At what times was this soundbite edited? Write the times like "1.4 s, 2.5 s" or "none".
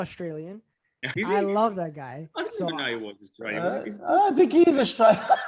1.1 s